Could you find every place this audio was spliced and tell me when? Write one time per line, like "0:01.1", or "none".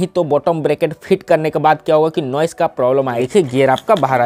0:03.2

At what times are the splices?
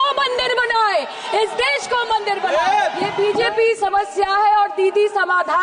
0:03.1

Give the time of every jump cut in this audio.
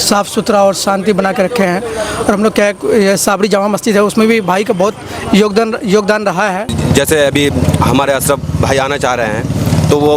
0:06.7

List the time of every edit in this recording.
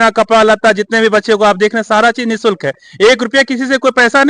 none

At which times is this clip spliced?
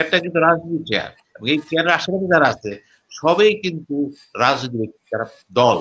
none

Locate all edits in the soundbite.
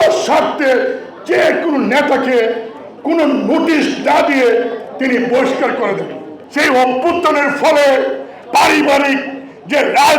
0:06.4

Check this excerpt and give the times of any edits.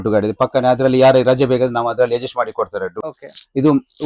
0:03.0

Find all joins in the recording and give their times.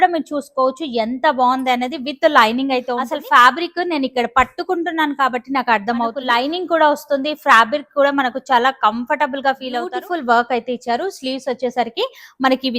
0:03.2
0:06.2
0:09.9

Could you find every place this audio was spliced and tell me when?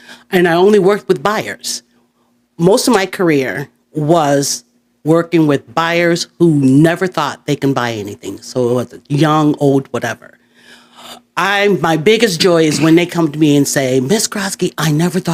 none

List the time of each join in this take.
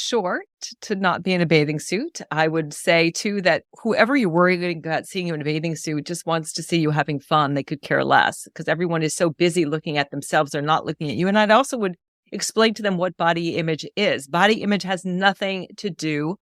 none

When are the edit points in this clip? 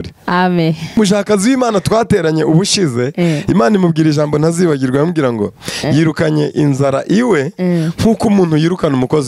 0:01.0

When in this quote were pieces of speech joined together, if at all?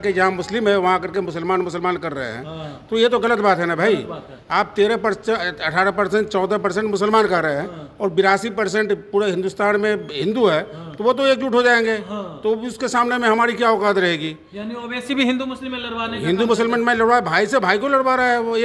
none

